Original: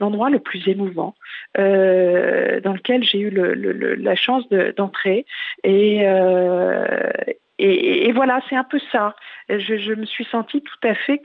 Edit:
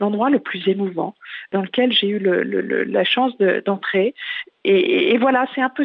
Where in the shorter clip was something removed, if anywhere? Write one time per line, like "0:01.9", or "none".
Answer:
0:01.5
0:04.4